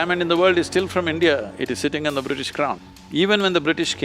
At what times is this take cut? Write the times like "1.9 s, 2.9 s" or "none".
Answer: 2.8 s

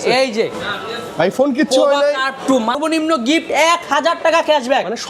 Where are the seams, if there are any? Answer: 2.8 s

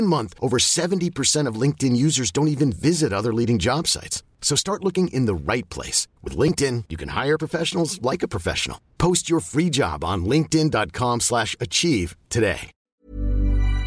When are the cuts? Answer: 12.7 s

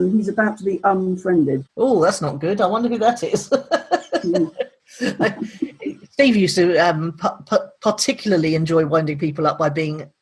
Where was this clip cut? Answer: 1.7 s

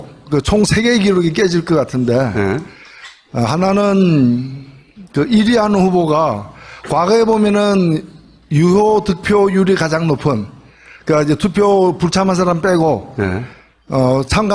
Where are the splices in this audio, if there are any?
12.9 s

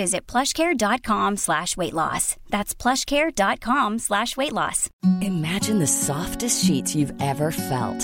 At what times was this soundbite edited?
4.8 s

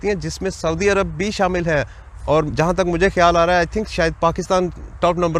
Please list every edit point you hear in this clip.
none

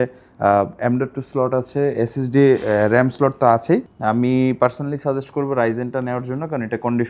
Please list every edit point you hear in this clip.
3.9 s

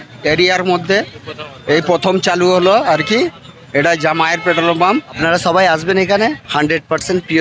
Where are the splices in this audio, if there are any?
none

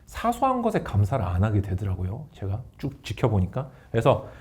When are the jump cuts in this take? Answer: none

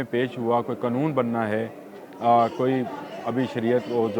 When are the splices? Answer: none

